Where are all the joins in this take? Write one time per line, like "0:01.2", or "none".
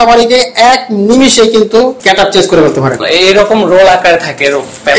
0:02.0
0:03.0